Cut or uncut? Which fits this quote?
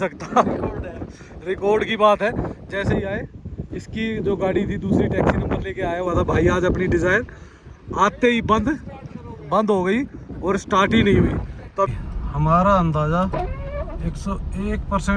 cut